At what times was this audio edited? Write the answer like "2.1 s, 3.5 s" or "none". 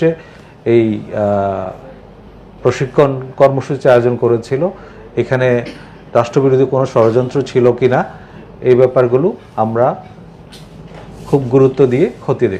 none